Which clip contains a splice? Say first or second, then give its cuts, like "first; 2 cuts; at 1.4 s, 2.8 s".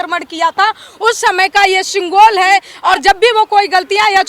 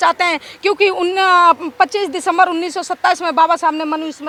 first; 1 cut; at 2.7 s